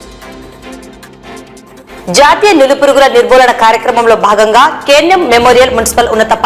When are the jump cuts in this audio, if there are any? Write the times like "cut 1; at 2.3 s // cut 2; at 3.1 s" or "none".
cut 1; at 1.3 s // cut 2; at 1.8 s